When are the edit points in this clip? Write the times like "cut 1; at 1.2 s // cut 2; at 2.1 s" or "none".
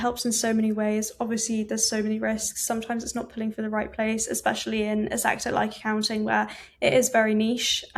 none

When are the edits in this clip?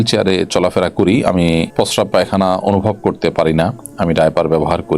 cut 1; at 1.7 s

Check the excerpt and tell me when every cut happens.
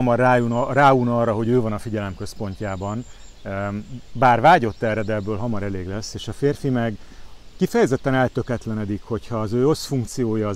none

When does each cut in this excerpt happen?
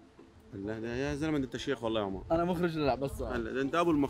none

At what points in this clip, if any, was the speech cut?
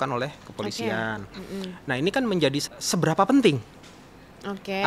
cut 1; at 2.7 s

